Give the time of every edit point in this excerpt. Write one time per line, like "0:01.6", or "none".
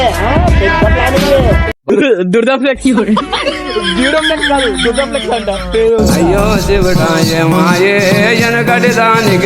0:01.7